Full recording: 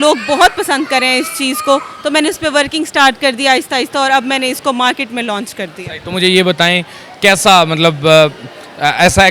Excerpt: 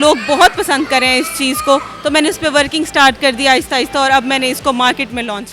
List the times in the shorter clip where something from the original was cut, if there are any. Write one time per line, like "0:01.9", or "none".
none